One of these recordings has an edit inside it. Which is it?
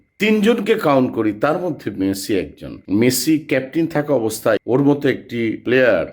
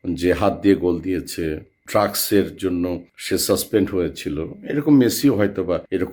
first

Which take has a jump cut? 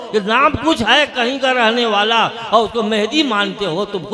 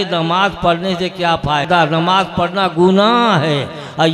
second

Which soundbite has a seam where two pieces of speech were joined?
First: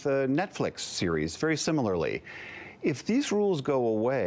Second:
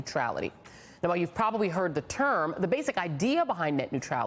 second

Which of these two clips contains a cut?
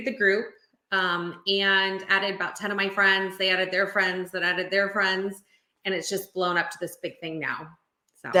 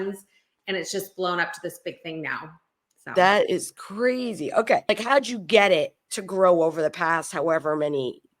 second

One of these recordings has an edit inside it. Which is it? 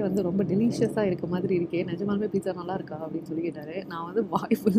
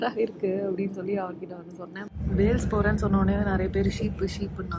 second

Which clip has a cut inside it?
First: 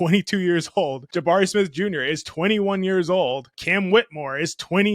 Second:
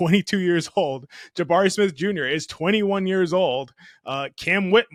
first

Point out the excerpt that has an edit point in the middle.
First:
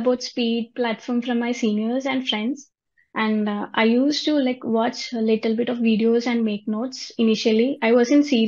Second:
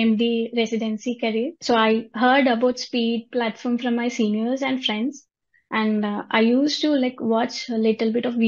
second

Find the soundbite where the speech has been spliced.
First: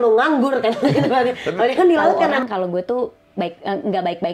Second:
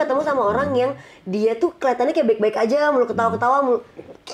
first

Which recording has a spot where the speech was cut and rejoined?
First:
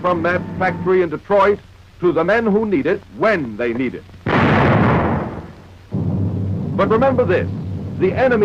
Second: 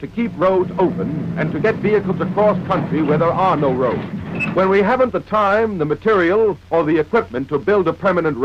second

